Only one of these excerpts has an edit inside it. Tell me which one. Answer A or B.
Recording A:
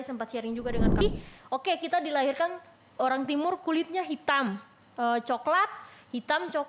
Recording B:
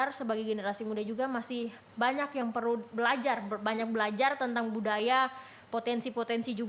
A